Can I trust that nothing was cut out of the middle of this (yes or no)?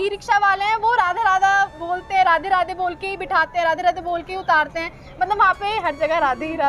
yes